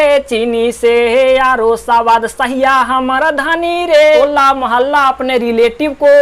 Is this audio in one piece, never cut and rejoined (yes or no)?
no